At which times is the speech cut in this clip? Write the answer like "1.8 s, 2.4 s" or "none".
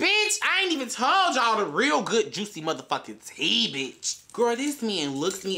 4.1 s